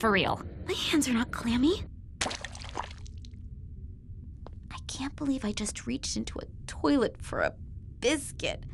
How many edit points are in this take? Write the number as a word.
two